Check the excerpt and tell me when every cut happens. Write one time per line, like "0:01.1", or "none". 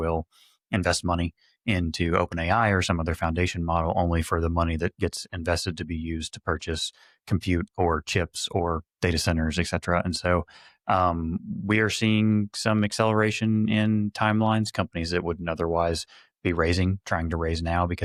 none